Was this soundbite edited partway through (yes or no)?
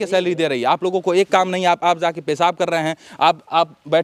no